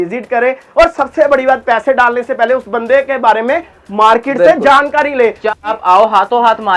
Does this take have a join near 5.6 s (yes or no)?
yes